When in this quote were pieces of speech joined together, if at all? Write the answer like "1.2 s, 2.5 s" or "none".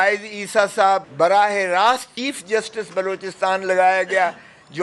1.1 s, 2.1 s